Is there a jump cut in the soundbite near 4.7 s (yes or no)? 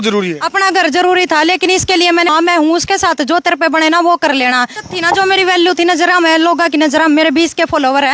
yes